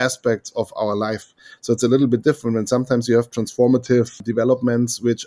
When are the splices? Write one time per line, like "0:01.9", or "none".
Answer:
0:04.2